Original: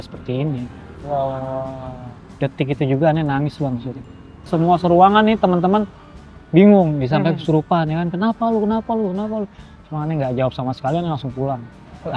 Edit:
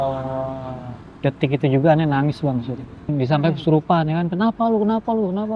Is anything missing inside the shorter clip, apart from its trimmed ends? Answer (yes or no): yes